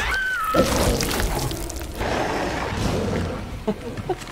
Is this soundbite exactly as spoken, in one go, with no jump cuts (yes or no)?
no